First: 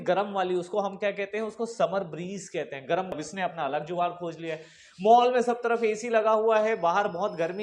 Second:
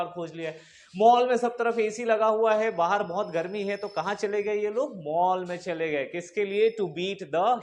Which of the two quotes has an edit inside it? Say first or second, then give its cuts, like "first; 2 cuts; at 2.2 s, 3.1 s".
first; 1 cut; at 3.1 s